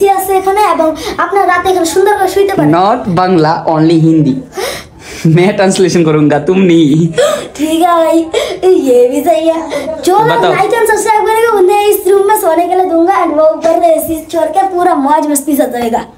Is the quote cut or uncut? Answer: uncut